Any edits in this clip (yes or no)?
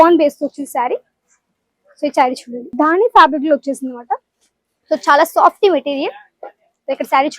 yes